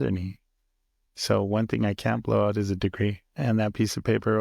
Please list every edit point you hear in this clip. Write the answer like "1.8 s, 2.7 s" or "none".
3.4 s